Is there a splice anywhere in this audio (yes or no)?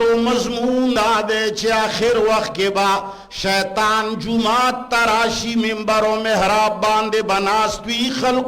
yes